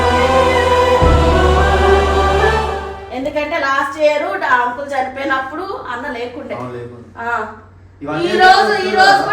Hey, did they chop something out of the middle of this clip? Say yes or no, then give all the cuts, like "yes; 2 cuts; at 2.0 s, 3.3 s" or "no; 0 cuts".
yes; 1 cut; at 3.0 s